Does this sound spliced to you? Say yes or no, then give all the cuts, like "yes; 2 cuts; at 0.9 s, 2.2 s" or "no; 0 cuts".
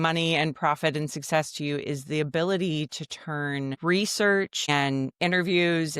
yes; 2 cuts; at 3.8 s, 4.7 s